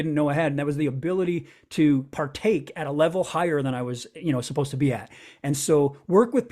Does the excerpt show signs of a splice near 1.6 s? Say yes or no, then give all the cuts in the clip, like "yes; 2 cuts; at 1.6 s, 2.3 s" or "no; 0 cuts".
no; 0 cuts